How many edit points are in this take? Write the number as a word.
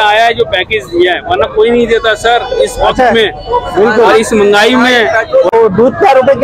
one